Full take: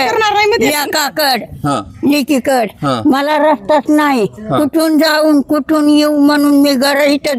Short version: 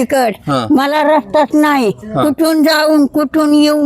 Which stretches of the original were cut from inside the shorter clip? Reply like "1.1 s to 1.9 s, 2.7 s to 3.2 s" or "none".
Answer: none